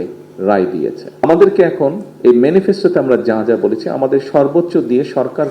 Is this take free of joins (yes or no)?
no